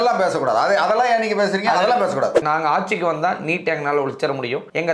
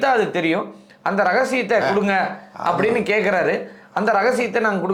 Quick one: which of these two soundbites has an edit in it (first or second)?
first